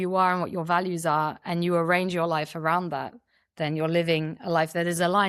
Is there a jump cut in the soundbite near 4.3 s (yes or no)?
no